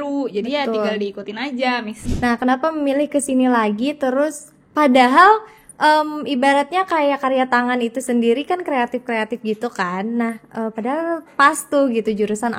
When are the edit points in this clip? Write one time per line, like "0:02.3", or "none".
0:01.9